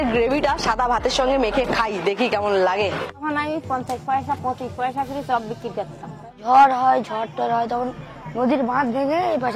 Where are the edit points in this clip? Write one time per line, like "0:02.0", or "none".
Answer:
0:03.3
0:06.4